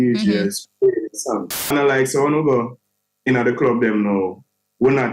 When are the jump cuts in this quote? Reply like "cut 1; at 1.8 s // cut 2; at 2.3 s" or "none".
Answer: cut 1; at 1.7 s